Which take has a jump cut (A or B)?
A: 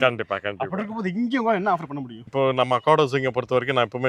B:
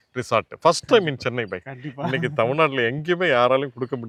A